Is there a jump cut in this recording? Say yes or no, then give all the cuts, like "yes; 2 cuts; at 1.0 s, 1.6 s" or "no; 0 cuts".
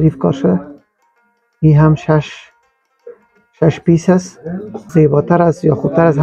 yes; 1 cut; at 4.8 s